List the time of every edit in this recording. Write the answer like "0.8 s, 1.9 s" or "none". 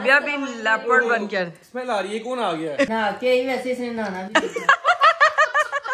2.9 s